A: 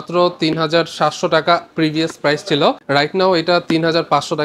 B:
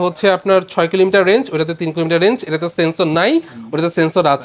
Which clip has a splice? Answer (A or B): A